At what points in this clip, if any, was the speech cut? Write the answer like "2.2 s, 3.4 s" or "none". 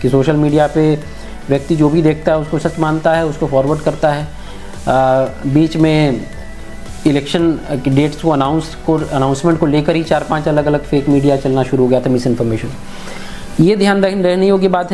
none